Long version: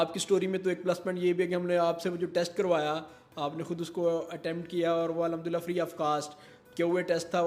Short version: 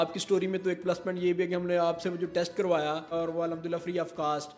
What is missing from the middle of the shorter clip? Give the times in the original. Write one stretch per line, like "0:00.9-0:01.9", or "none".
0:03.1-0:04.9